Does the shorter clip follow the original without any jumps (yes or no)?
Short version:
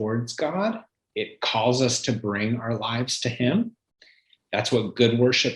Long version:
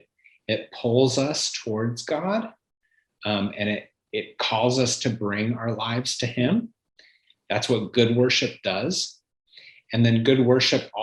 no